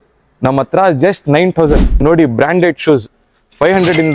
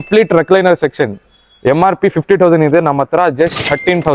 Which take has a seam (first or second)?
first